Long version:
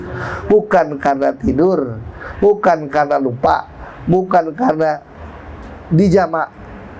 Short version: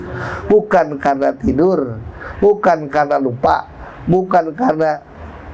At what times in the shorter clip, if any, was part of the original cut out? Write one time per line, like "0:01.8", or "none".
none